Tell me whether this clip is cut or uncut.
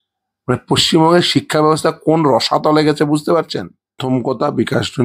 cut